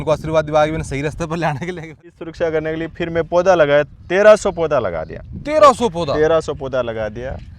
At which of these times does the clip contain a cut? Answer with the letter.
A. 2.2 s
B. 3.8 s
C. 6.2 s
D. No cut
A